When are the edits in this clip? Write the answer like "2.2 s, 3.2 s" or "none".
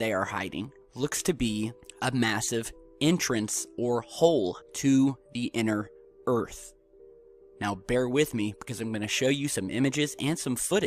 7.8 s